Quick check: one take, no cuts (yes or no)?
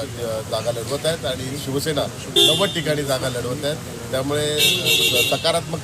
yes